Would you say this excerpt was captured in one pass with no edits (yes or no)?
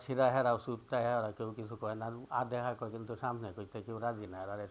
yes